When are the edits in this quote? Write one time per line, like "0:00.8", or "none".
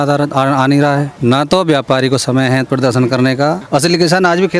0:01.1
0:03.6